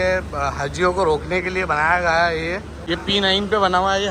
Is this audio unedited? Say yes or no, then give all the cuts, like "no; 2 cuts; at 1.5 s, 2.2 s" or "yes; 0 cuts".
no; 1 cut; at 2.7 s